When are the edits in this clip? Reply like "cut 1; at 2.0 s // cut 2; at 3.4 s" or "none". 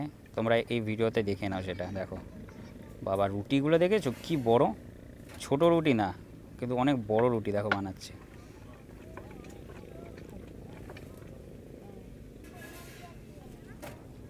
none

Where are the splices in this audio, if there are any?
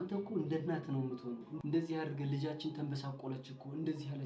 cut 1; at 1.5 s

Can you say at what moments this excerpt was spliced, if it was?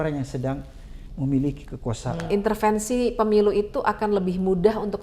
cut 1; at 2.3 s

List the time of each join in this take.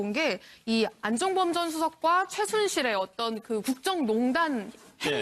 cut 1; at 2.1 s

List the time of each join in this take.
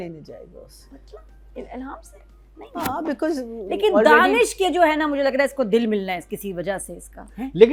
none

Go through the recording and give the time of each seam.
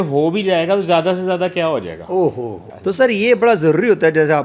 none

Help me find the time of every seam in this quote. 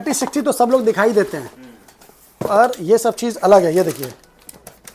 none

